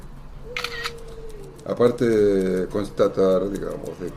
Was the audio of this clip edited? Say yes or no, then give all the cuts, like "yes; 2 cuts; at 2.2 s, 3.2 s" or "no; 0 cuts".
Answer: yes; 1 cut; at 2.8 s